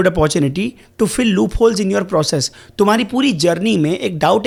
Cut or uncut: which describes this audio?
uncut